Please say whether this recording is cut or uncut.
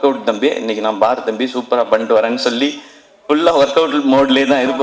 uncut